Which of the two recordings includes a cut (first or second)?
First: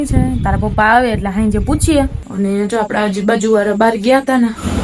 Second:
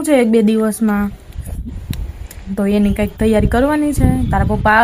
first